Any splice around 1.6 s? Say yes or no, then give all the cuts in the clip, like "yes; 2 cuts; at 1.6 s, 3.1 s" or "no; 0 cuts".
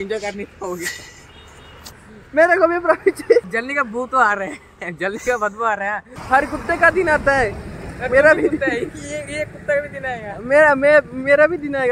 no; 2 cuts; at 3.5 s, 6.1 s